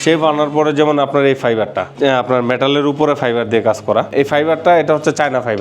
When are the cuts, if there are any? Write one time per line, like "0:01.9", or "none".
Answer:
0:04.1